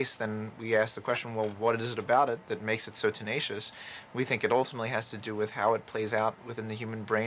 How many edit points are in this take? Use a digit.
0